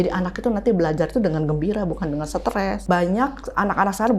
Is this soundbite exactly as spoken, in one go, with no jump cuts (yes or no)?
no